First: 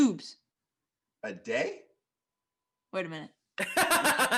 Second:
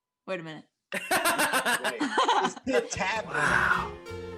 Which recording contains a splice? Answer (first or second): second